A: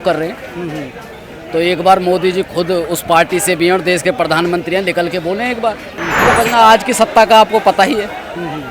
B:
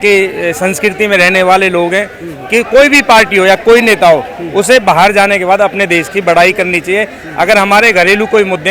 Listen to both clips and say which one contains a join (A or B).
A